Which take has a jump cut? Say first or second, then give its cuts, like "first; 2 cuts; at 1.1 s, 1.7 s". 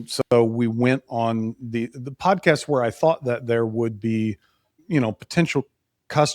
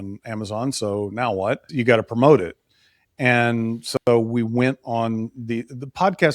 second; 1 cut; at 1.7 s